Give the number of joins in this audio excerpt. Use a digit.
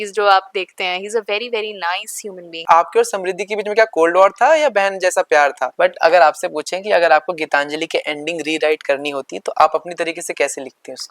2